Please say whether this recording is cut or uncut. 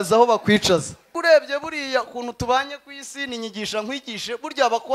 cut